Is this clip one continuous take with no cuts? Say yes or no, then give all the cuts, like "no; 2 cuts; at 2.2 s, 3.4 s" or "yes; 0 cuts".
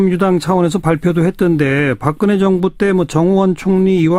yes; 0 cuts